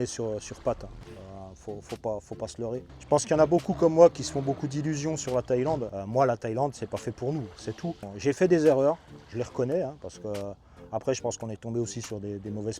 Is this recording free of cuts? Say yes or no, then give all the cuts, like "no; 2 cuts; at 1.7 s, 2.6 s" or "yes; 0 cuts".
no; 3 cuts; at 2.9 s, 5.9 s, 8.1 s